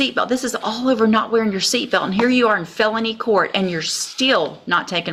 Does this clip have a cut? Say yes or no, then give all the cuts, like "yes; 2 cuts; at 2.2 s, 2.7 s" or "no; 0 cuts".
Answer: no; 0 cuts